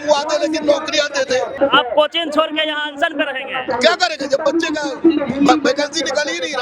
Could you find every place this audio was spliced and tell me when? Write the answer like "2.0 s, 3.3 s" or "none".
1.5 s